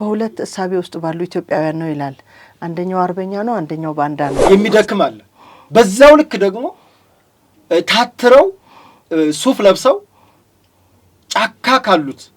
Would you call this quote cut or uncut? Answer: cut